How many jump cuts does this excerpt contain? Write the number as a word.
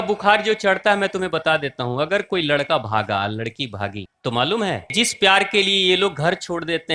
two